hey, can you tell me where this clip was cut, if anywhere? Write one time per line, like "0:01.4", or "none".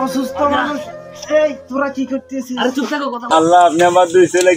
0:03.2